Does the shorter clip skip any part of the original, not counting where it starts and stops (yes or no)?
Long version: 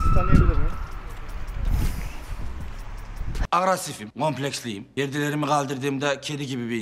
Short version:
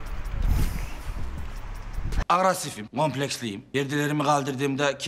no